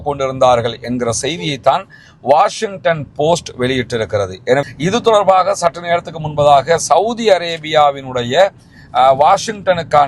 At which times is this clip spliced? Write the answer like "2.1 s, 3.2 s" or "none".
4.6 s